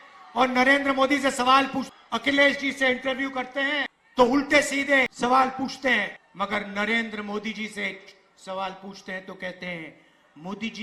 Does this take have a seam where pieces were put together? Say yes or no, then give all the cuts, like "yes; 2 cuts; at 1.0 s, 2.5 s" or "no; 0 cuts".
yes; 4 cuts; at 1.9 s, 4.0 s, 5.1 s, 6.2 s